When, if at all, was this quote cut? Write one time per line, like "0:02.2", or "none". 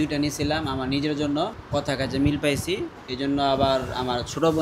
0:01.6
0:03.0